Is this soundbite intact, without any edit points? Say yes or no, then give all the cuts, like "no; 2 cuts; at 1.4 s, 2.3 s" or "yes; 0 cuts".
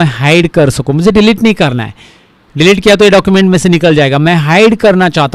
yes; 0 cuts